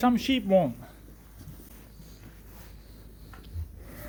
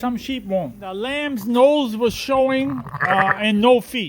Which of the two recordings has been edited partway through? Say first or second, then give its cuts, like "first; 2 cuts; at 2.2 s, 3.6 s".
second; 1 cut; at 1.1 s